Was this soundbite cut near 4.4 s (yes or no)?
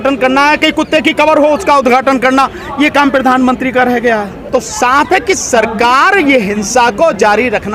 yes